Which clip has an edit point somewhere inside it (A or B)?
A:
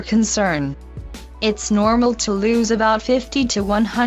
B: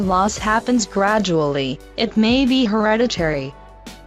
A